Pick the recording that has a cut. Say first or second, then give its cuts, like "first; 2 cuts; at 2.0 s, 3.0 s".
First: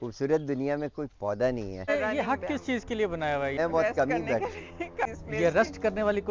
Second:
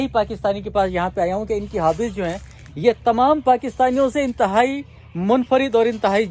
first; 2 cuts; at 1.9 s, 3.6 s